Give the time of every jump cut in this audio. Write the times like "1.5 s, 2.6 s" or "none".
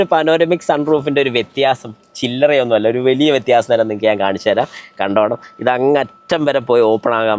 none